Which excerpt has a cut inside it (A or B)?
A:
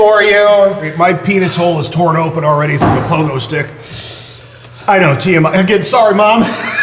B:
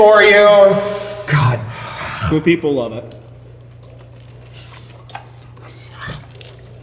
A